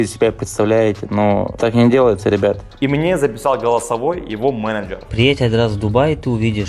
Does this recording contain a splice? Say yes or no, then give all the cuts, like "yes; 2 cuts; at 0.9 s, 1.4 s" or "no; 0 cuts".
yes; 3 cuts; at 1.5 s, 2.7 s, 5.0 s